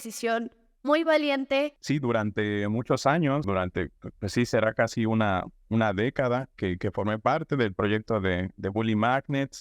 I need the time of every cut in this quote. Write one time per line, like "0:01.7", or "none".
0:01.7
0:03.5